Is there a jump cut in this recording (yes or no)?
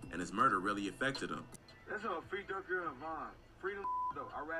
yes